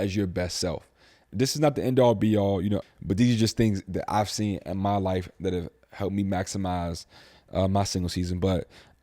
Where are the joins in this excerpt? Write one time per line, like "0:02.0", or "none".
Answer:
0:01.3
0:02.8